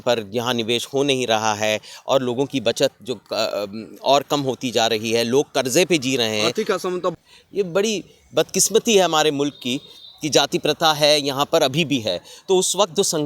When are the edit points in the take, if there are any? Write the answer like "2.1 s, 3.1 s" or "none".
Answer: 7.2 s